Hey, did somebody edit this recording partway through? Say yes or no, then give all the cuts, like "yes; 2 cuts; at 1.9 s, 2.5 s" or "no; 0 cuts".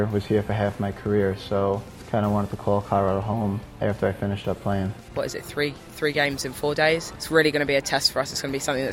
yes; 4 cuts; at 1.9 s, 3.7 s, 5.1 s, 7.1 s